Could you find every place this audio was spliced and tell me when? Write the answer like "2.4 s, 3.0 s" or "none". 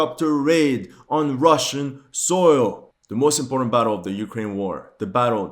2.8 s